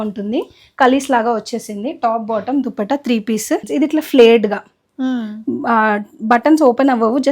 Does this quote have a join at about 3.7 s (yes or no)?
yes